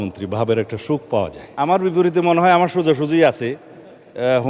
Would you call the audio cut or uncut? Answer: cut